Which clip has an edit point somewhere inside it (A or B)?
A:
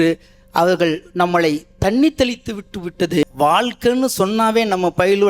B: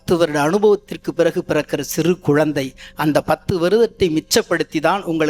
A